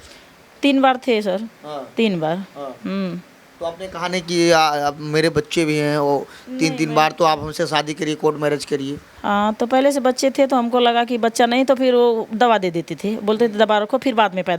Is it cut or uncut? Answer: uncut